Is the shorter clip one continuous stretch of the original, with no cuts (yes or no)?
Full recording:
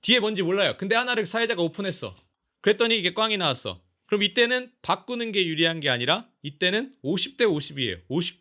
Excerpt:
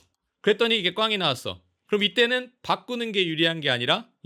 yes